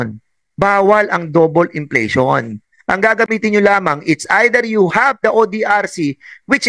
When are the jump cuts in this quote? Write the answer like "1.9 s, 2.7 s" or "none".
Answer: none